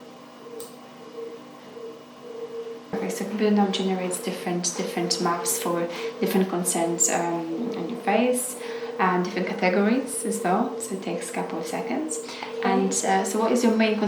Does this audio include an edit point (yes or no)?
yes